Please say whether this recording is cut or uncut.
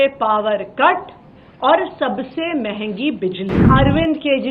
cut